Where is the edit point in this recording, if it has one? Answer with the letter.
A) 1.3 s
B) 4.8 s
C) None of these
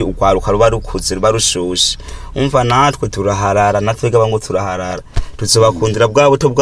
C